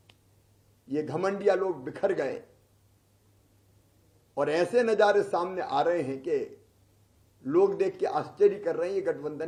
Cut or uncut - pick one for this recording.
uncut